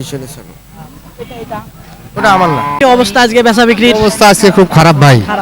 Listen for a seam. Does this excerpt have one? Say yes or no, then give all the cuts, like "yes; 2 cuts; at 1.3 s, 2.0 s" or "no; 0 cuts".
yes; 1 cut; at 2.8 s